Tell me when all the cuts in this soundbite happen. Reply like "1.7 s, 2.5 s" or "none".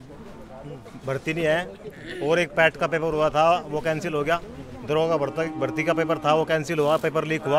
none